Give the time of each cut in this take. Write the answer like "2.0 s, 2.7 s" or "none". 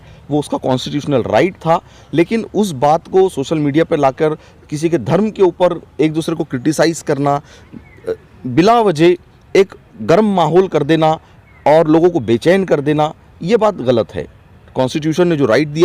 none